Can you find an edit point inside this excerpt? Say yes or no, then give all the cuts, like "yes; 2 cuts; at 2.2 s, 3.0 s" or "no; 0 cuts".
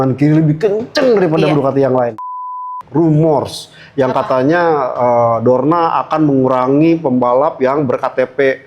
yes; 1 cut; at 2.3 s